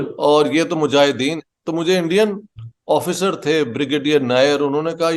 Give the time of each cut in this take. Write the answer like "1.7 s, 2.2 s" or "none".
1.5 s